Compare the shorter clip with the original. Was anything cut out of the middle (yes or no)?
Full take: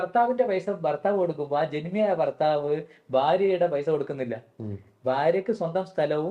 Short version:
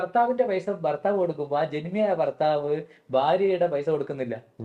no